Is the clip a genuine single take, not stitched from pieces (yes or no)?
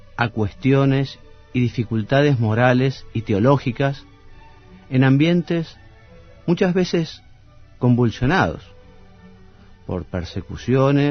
yes